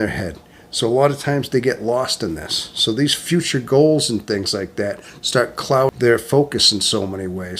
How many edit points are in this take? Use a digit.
1